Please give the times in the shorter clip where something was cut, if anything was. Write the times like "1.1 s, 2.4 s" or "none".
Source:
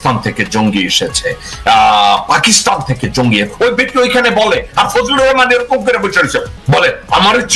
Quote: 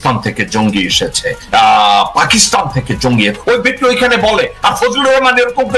1.4 s